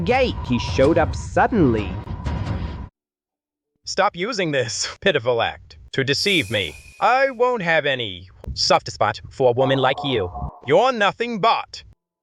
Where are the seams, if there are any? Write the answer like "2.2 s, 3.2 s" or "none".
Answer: 2.9 s